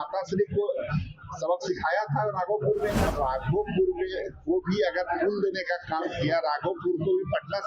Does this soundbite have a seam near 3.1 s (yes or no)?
yes